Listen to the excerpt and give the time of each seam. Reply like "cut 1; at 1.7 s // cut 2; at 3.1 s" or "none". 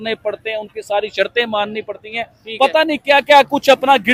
none